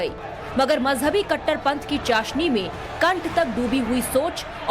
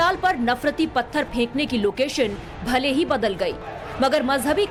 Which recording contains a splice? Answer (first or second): first